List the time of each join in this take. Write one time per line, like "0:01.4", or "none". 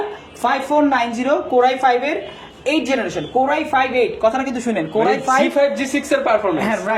none